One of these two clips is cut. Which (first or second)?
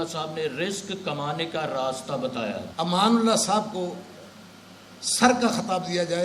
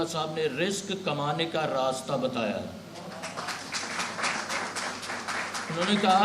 first